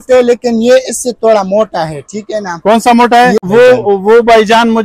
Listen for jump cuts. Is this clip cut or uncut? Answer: cut